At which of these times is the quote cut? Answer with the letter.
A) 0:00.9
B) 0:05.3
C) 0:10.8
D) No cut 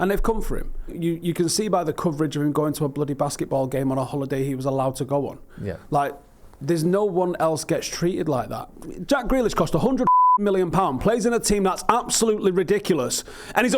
A